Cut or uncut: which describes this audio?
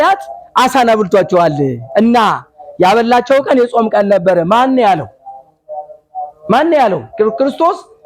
uncut